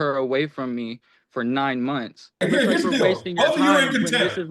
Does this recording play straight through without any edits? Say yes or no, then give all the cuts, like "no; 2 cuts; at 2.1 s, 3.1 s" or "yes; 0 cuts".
no; 1 cut; at 2.4 s